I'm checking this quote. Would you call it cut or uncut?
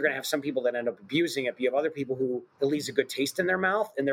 cut